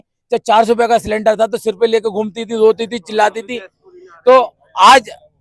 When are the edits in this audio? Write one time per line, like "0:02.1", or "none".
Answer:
none